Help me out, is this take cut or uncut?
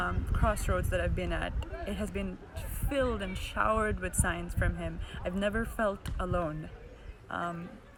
uncut